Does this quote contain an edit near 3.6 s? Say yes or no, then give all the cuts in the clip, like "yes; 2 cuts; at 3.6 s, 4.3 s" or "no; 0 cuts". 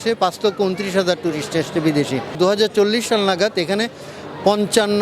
no; 1 cut; at 2.3 s